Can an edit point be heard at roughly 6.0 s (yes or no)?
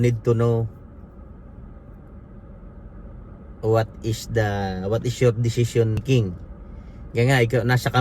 yes